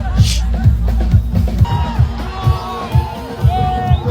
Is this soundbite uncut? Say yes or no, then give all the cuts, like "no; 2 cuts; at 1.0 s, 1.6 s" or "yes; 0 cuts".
no; 1 cut; at 1.7 s